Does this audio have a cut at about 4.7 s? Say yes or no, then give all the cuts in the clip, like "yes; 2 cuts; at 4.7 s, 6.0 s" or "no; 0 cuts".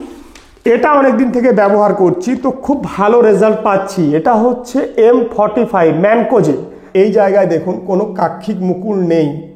no; 1 cut; at 6.7 s